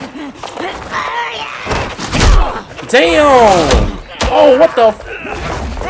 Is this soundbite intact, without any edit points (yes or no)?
yes